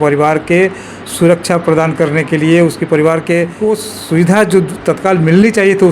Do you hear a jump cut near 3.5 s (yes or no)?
yes